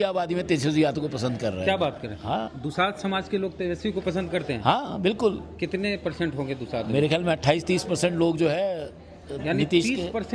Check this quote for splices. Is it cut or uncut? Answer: uncut